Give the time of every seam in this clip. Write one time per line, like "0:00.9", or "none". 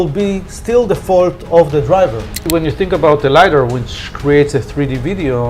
0:02.4